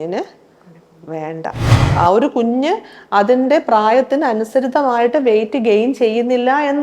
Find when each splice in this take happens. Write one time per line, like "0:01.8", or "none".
0:01.8